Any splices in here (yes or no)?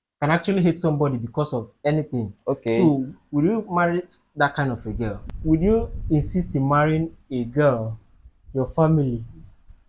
yes